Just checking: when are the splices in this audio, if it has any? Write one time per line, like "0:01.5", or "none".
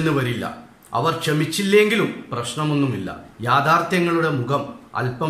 none

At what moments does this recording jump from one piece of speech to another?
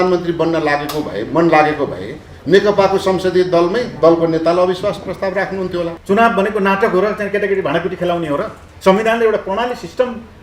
0:06.0

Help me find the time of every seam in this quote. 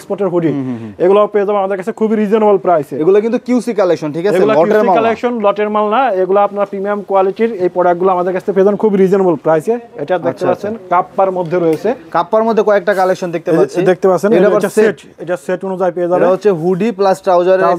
none

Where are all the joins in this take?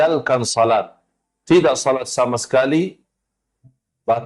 none

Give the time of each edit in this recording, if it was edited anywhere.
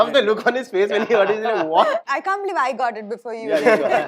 0:02.0

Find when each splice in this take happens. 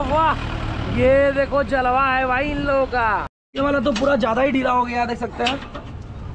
0:03.4

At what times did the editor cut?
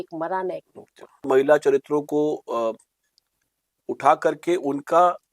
0:01.3

